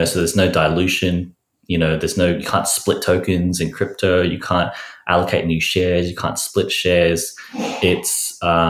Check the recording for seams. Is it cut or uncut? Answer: uncut